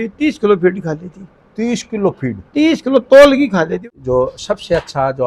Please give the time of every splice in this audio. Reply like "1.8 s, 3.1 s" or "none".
3.8 s